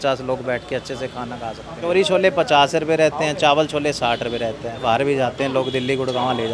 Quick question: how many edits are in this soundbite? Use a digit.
2